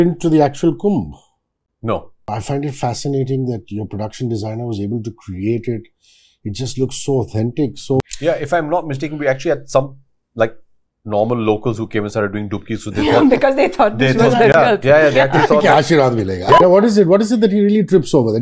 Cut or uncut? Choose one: cut